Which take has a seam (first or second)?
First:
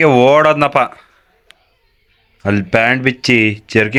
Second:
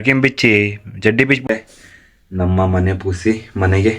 second